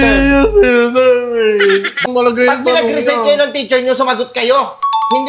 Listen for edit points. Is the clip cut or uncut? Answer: cut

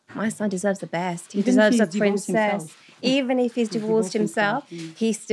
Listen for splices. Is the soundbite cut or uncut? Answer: uncut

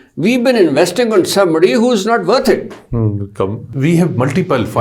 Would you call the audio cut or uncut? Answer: cut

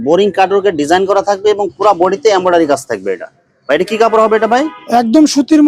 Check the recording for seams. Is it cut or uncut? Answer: uncut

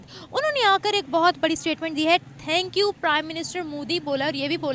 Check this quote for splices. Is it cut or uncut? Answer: uncut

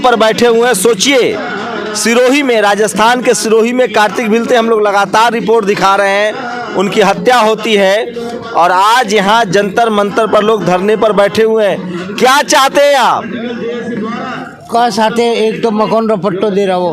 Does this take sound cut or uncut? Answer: uncut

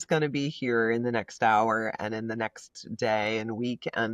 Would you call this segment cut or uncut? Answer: uncut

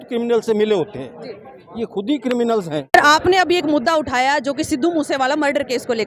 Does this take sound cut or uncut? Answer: uncut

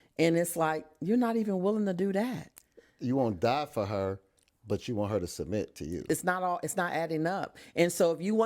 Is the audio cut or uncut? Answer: cut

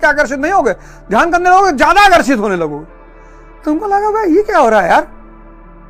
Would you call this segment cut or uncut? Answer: uncut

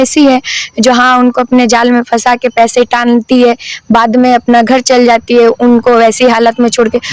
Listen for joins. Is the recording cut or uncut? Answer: uncut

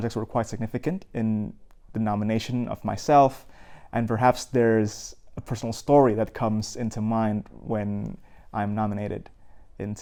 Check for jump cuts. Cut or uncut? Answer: uncut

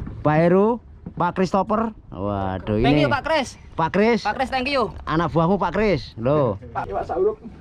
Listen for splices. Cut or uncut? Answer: cut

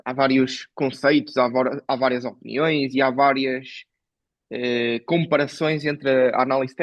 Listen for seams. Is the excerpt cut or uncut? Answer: uncut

